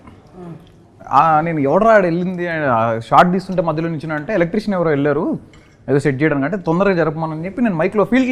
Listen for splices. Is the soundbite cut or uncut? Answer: uncut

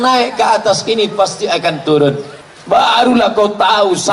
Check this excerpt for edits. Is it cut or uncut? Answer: cut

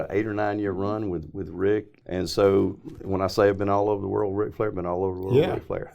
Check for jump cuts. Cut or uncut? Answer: cut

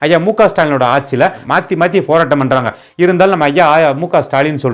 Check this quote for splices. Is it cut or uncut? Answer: cut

